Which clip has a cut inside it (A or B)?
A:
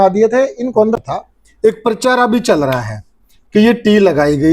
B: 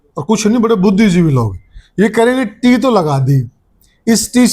A